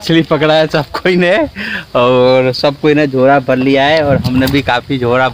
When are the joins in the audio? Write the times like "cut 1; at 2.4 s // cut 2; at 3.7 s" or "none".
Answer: none